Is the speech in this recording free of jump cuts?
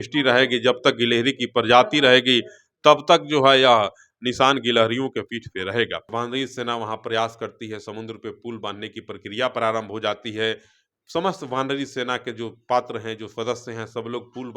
no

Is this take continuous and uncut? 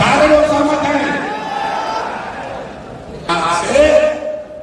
no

